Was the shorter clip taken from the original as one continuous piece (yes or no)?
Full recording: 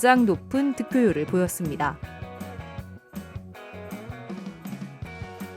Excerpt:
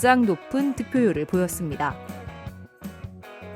no